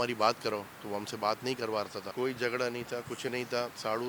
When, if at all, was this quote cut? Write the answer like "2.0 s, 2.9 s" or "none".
2.1 s